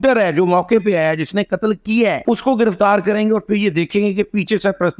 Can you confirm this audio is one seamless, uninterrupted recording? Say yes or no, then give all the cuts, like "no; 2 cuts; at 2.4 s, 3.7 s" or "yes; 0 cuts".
yes; 0 cuts